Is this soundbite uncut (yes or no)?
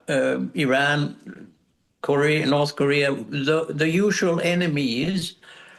yes